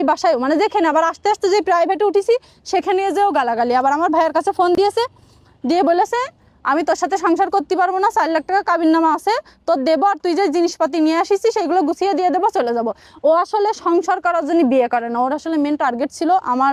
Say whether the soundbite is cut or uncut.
uncut